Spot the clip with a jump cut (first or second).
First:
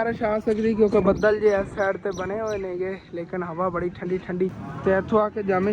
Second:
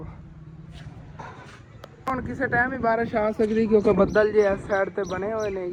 first